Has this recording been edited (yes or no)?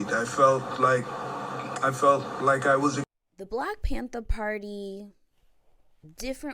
yes